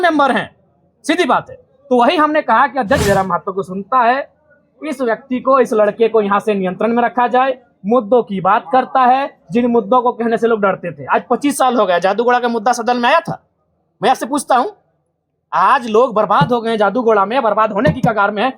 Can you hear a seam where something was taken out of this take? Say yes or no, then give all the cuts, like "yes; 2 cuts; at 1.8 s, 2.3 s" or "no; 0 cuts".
yes; 1 cut; at 3.0 s